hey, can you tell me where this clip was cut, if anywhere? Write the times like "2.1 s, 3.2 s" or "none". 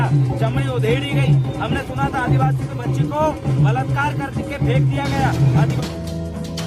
5.7 s